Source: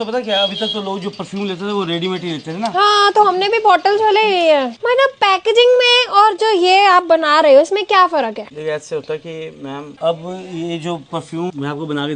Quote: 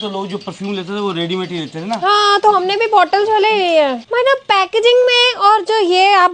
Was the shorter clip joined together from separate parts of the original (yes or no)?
no